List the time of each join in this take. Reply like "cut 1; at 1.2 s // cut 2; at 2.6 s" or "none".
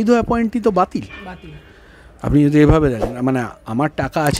none

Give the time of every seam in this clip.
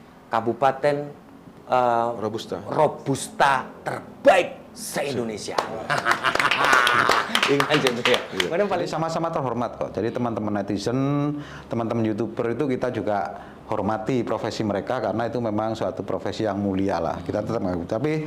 cut 1; at 8.7 s

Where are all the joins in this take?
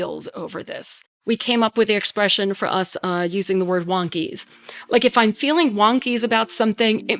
cut 1; at 1.1 s

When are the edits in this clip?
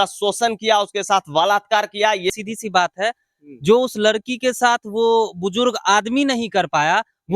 cut 1; at 2.1 s

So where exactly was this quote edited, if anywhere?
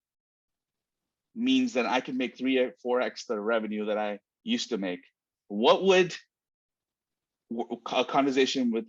none

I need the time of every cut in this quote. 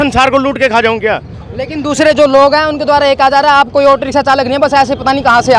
none

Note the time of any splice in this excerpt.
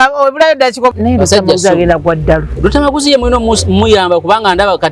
cut 1; at 0.9 s

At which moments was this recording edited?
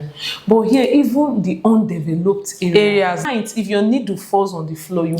cut 1; at 3.2 s

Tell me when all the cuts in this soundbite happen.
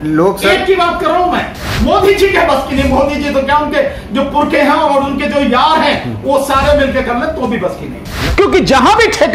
cut 1; at 1.7 s // cut 2; at 8.1 s

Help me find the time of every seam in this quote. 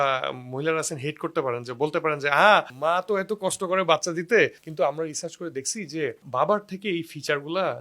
none

